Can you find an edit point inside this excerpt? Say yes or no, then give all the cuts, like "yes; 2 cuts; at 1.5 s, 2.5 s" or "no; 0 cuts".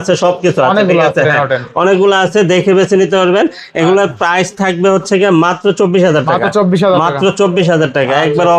no; 0 cuts